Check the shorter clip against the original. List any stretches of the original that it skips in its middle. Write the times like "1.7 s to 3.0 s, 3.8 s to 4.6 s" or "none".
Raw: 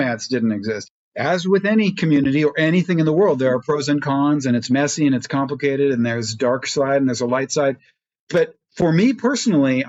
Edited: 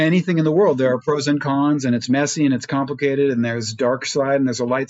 none